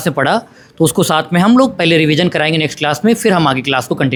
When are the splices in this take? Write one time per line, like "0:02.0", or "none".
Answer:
none